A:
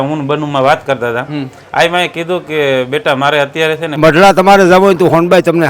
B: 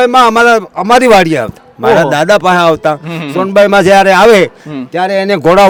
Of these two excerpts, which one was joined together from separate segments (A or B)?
A